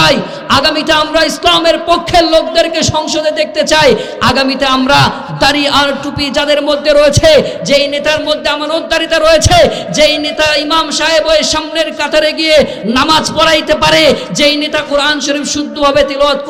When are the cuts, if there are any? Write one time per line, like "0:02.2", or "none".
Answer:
none